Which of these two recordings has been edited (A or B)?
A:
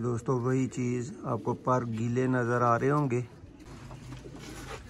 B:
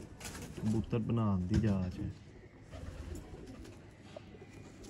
A